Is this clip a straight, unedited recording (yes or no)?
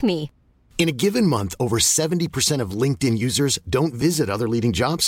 yes